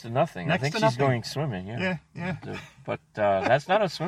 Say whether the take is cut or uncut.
uncut